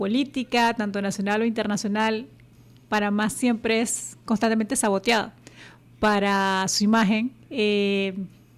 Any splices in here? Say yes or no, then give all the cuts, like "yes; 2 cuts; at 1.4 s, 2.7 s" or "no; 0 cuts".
no; 0 cuts